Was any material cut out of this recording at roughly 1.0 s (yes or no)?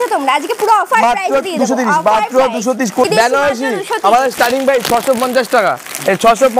no